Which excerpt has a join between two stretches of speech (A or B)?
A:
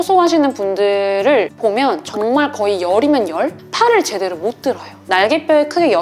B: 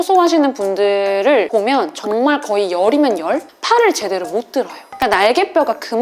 B